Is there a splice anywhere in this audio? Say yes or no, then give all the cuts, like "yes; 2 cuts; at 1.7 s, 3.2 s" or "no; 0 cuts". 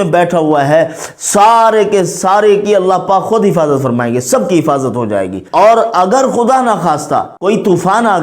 yes; 2 cuts; at 5.4 s, 7.3 s